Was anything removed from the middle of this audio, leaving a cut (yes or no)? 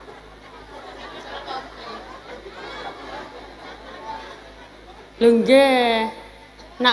no